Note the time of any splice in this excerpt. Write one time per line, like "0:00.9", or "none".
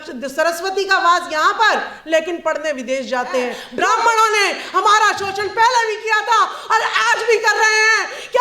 0:03.6